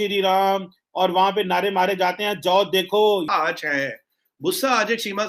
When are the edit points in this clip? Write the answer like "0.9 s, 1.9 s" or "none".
3.2 s